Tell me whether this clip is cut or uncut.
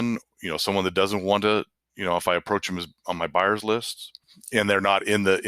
uncut